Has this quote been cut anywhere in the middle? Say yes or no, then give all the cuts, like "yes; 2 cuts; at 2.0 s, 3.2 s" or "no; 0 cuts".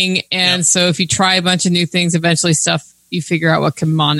no; 0 cuts